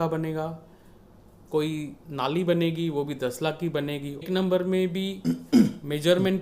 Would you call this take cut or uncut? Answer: cut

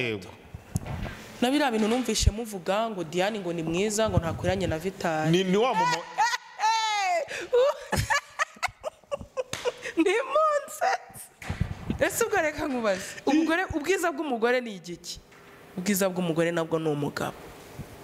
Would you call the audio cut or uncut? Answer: uncut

